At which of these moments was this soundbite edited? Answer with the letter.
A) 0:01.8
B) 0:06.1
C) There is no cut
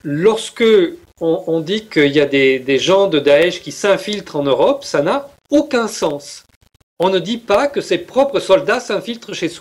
C